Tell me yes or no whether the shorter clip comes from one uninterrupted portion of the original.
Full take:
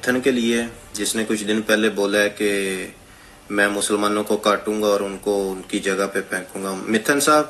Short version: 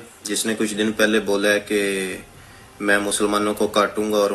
yes